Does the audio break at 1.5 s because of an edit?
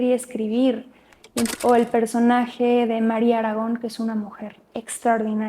yes; 1 cut; at 1.5 s

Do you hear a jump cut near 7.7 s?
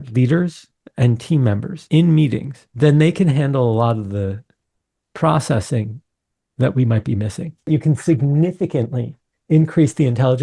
yes; 3 cuts; at 1.7 s, 2.6 s, 7.7 s

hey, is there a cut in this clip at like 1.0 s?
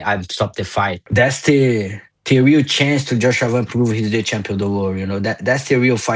yes; 1 cut; at 1.0 s

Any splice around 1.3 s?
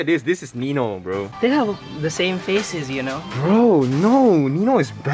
yes; 1 cut; at 1.3 s

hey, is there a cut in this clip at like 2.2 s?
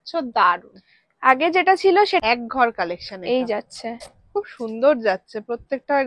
yes; 1 cut; at 2.2 s

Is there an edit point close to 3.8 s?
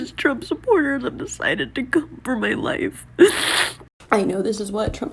yes; 1 cut; at 3.8 s

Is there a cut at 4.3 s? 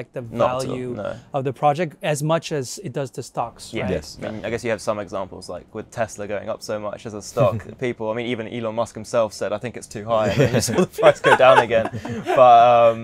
yes; 1 cut; at 4.3 s

